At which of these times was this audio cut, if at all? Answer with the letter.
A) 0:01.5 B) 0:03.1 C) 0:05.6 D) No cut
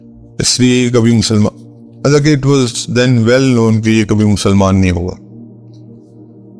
C